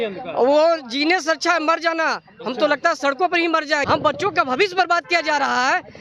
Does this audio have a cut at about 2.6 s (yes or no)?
no